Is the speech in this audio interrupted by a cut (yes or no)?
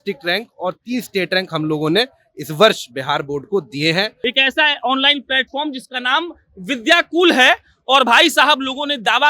yes